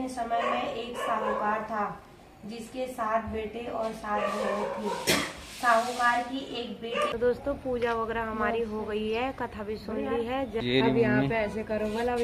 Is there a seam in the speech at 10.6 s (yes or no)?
yes